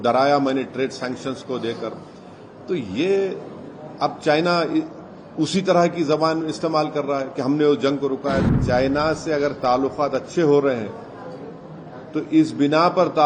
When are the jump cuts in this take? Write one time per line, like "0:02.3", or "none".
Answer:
0:08.5